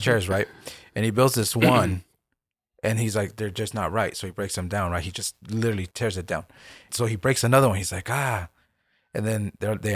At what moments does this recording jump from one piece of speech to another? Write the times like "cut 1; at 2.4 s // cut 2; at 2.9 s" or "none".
cut 1; at 6.9 s